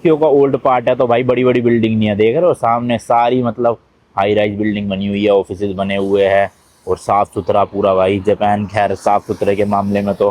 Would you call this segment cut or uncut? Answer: uncut